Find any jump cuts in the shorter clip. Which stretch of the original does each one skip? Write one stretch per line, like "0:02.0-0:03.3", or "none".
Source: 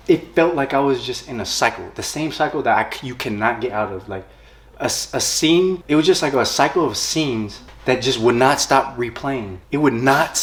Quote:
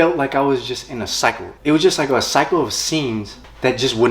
0:02.0-0:05.8